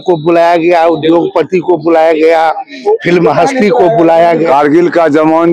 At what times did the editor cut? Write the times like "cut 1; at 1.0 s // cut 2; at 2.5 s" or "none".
cut 1; at 4.5 s